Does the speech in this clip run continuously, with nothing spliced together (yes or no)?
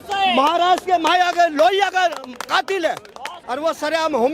no